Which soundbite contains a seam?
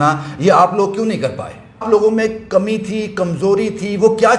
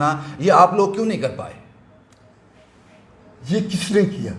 first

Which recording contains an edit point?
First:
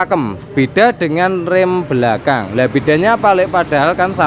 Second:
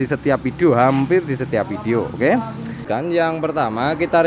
second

